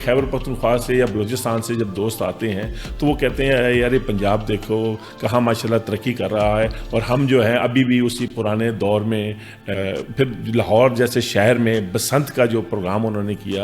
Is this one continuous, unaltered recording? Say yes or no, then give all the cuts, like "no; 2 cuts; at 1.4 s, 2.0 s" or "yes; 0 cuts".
no; 1 cut; at 9.7 s